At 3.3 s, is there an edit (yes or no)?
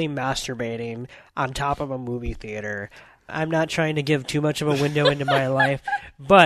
yes